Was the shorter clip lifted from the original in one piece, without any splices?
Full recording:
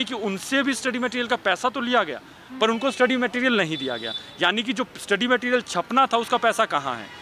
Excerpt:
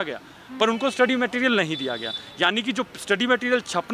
yes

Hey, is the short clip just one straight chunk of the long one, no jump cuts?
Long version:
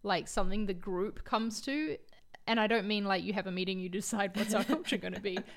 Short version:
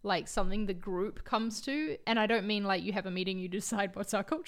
no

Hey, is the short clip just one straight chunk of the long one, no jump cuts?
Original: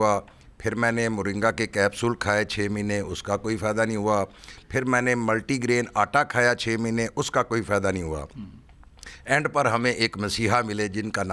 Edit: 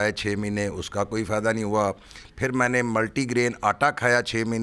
yes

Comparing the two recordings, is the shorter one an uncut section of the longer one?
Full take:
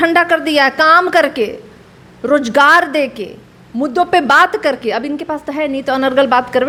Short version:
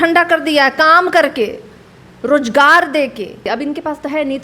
no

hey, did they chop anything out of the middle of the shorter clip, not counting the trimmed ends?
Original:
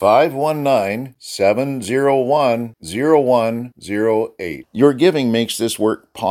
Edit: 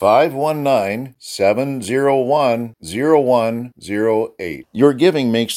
no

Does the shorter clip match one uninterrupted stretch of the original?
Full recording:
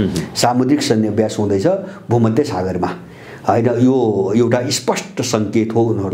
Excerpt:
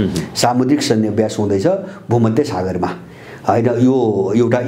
yes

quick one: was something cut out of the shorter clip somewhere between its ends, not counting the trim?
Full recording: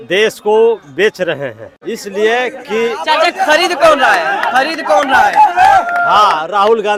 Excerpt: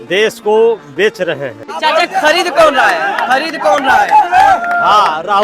yes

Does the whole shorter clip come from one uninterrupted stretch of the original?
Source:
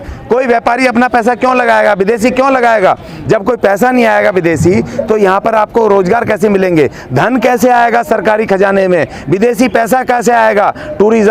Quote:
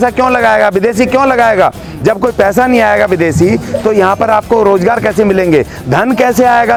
yes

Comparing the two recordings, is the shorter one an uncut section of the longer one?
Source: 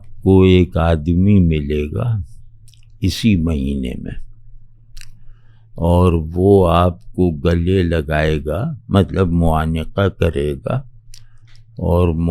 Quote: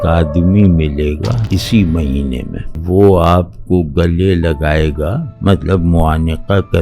no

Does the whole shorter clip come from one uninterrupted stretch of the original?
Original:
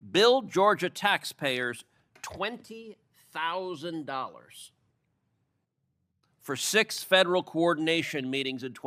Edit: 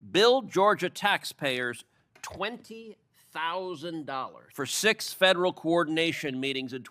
no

